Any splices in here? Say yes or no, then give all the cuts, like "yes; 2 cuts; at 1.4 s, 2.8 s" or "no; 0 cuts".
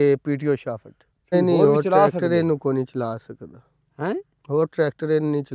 yes; 1 cut; at 1.3 s